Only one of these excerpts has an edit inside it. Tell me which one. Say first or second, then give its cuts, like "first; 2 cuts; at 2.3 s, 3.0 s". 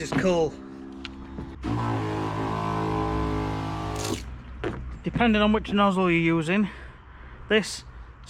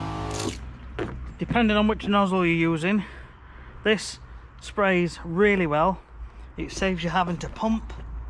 first; 1 cut; at 1.6 s